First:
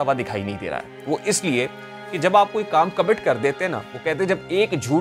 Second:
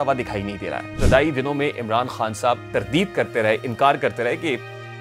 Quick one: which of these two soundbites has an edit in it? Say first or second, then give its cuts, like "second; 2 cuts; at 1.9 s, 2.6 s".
second; 2 cuts; at 0.9 s, 2.6 s